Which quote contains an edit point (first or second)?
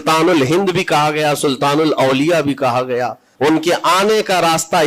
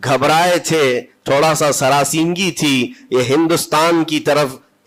first